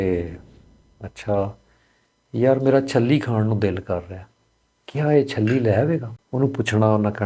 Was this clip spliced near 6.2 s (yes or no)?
yes